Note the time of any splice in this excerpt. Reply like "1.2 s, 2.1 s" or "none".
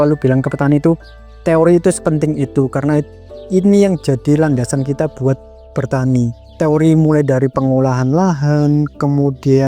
6.4 s